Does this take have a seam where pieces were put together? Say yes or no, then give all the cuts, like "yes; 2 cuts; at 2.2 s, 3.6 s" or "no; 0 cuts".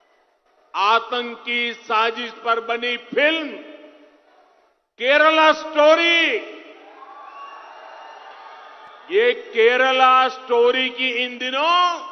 no; 0 cuts